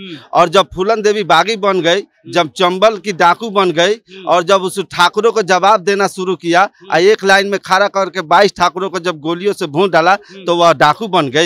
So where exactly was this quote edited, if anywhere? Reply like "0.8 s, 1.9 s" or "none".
none